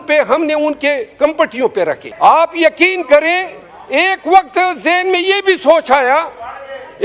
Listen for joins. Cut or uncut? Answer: cut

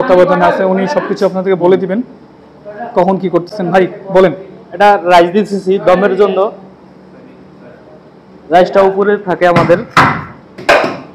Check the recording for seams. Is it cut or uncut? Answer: uncut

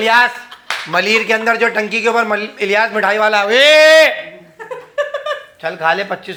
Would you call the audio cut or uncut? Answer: uncut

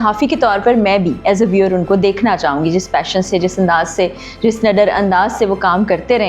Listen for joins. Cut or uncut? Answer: uncut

